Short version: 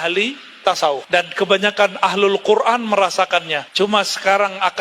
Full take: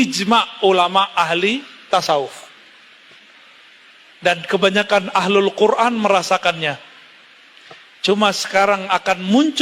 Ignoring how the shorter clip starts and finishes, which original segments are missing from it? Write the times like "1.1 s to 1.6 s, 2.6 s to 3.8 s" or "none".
2.3 s to 4.2 s, 6.7 s to 7.9 s